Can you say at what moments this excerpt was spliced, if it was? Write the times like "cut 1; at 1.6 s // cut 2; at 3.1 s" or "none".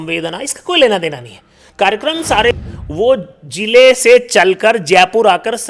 cut 1; at 2.5 s